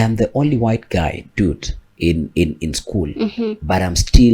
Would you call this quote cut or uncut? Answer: uncut